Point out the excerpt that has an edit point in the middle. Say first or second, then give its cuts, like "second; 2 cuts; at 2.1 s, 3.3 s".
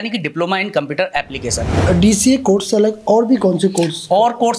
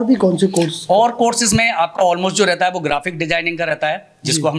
first; 1 cut; at 1.8 s